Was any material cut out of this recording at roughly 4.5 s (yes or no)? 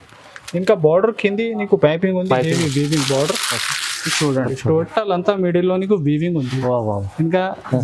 yes